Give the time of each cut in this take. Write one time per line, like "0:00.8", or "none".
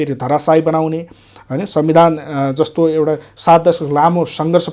none

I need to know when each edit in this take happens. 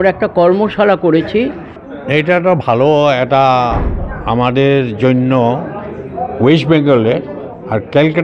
0:01.9

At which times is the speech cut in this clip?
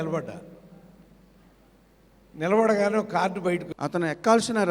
0:03.7

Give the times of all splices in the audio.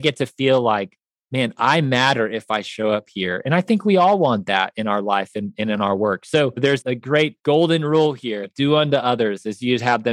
0:08.5

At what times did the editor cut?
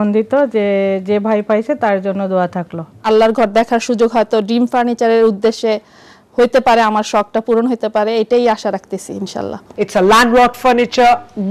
0:03.0
0:09.6

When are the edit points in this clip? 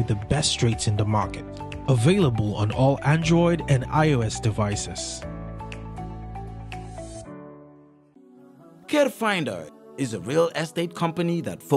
0:08.1

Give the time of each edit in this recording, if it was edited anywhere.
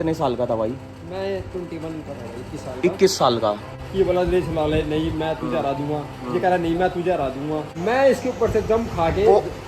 0:03.8
0:07.7

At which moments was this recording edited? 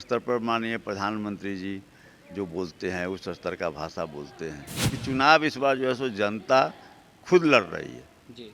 0:04.9

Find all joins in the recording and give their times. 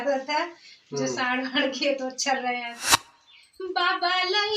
0:02.8

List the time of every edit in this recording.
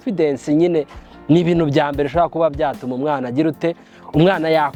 none

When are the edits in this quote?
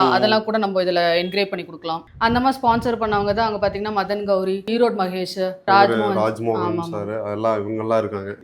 0:02.0

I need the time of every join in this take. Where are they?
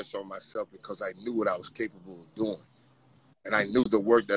none

